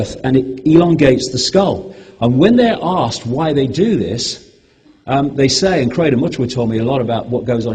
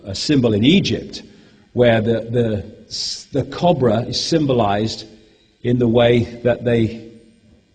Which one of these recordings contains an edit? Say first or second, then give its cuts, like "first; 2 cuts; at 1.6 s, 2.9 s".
first; 1 cut; at 1.7 s